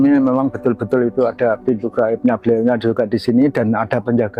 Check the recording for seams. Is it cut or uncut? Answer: uncut